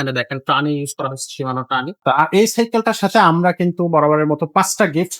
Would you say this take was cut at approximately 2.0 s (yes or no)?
yes